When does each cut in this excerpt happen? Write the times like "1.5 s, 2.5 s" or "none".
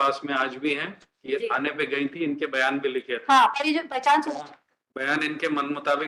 none